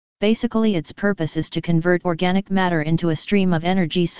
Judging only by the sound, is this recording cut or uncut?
cut